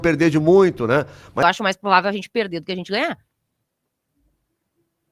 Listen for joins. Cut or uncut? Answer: cut